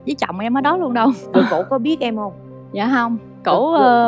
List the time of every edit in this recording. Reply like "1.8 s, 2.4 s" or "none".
none